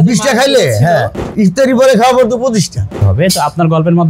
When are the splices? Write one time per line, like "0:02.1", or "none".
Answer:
0:01.2
0:03.0